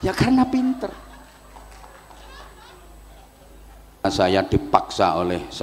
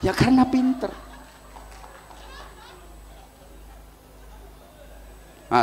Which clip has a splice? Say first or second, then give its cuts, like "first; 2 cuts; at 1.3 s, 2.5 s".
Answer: first; 1 cut; at 4.0 s